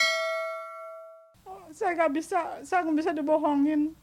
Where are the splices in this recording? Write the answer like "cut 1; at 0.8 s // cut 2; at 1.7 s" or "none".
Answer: cut 1; at 1.1 s